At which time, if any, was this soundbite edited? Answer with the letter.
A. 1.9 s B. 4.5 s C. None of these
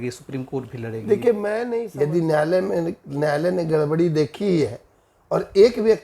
A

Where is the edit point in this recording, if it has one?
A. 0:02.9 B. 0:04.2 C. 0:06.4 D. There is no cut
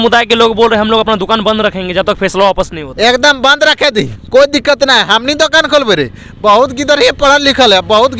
D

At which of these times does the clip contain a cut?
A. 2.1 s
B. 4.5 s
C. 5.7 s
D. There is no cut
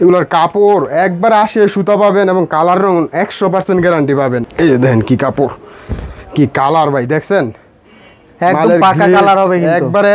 D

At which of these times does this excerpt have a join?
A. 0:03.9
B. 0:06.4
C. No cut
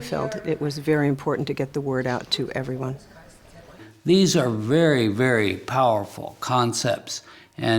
A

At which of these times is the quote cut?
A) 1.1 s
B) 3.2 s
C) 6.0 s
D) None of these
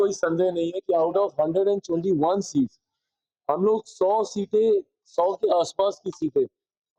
D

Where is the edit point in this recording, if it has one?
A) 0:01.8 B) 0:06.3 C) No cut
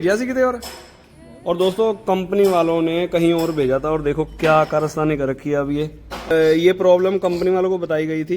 B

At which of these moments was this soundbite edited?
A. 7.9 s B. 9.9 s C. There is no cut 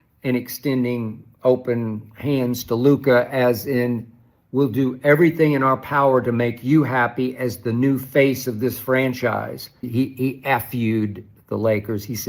B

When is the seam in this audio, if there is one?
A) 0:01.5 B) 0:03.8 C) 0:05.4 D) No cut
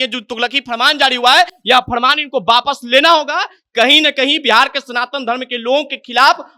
D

